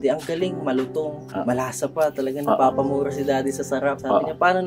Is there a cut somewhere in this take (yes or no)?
no